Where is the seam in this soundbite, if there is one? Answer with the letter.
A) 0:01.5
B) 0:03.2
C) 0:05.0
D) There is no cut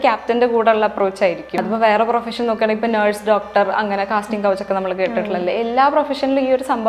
A